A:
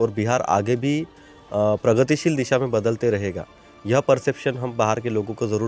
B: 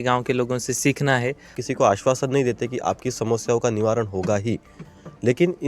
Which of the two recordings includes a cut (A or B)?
B